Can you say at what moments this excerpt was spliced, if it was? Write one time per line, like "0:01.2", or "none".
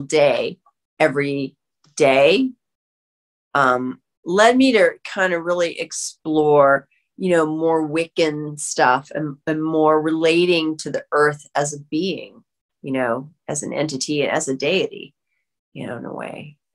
none